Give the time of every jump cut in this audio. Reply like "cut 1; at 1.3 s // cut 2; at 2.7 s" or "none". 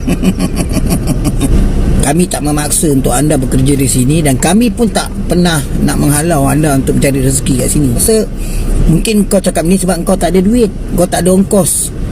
cut 1; at 1.5 s // cut 2; at 8.0 s